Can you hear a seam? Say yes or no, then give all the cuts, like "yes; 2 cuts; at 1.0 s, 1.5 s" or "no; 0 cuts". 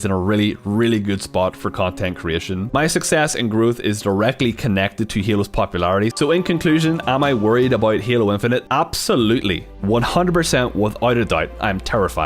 yes; 2 cuts; at 2.7 s, 6.1 s